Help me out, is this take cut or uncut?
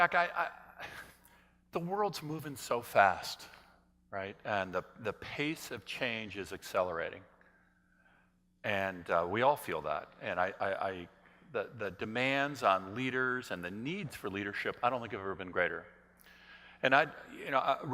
cut